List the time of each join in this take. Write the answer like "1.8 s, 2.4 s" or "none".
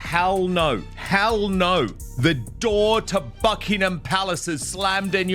0.9 s, 2.0 s

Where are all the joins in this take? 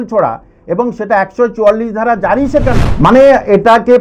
2.9 s

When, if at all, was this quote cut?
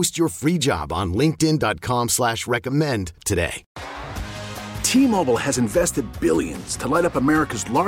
3.6 s

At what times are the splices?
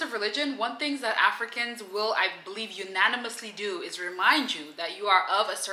none

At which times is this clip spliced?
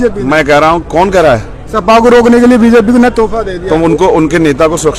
none

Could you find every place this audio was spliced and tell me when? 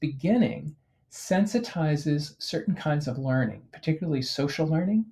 none

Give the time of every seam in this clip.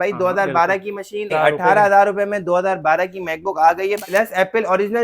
1.3 s, 4.0 s

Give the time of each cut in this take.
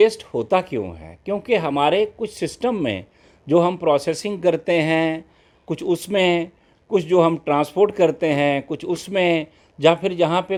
none

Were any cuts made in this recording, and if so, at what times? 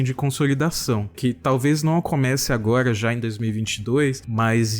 1.1 s

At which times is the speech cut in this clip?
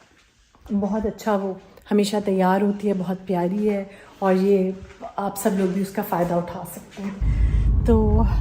7.3 s

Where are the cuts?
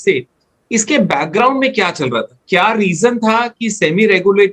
none

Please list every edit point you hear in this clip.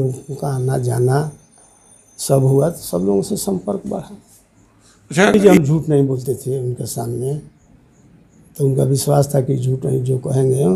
5.3 s

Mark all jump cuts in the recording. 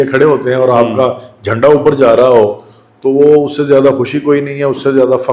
none

